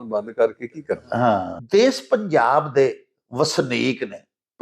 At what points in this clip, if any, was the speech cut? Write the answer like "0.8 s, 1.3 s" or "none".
1.5 s